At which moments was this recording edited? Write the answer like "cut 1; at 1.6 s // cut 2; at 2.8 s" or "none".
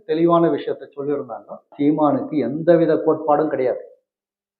cut 1; at 1.7 s